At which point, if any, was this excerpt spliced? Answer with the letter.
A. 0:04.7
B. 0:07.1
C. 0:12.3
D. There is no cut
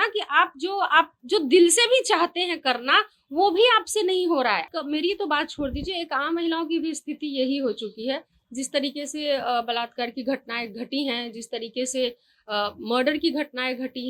A